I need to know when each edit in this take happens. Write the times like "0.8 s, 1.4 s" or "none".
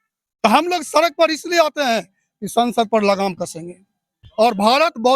4.2 s